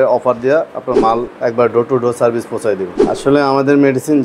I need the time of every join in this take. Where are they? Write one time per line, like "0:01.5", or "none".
0:03.0